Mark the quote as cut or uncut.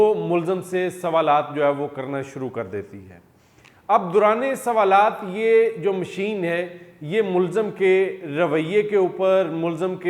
uncut